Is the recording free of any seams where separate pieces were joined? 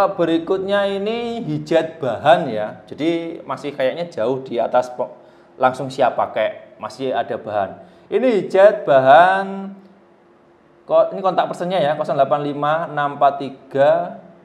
yes; 0 cuts

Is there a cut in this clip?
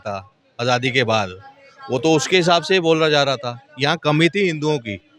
no; 0 cuts

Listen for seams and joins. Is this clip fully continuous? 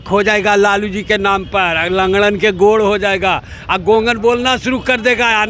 yes; 0 cuts

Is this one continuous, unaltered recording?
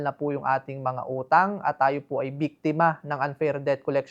yes; 0 cuts

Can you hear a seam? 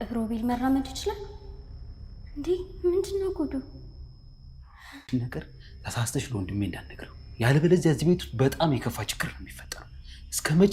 yes; 1 cut; at 5.0 s

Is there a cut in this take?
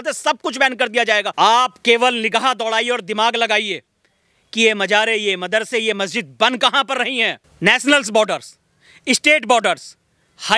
yes; 2 cuts; at 1.3 s, 7.4 s

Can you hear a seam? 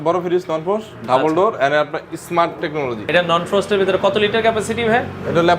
yes; 1 cut; at 3.1 s

